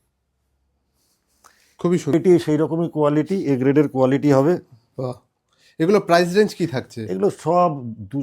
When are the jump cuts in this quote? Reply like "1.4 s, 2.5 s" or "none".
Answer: 2.1 s